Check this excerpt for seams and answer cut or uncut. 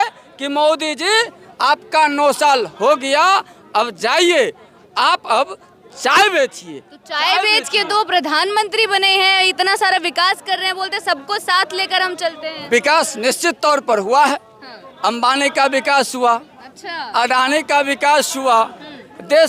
uncut